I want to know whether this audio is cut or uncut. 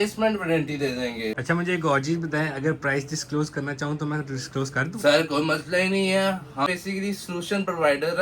cut